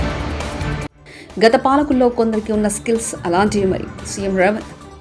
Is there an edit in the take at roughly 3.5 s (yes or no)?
no